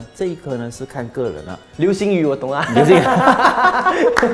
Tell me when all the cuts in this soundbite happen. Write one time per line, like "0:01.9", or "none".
none

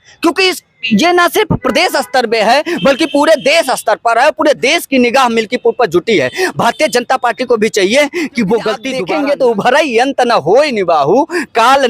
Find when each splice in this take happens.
0:08.9

